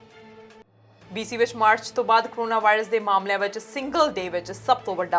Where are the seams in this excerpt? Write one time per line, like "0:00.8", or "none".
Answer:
0:01.0